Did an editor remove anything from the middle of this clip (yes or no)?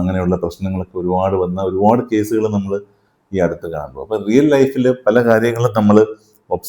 no